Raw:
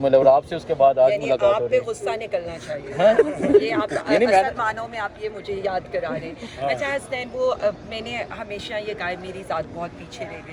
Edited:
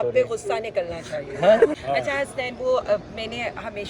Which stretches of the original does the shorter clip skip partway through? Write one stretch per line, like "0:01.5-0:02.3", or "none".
0:03.3-0:06.5